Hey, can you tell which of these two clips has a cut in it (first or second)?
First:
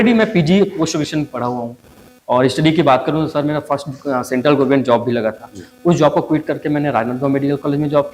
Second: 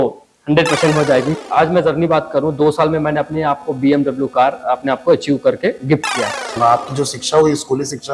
second